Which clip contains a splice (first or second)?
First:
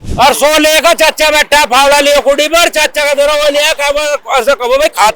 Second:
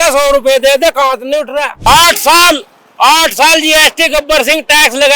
second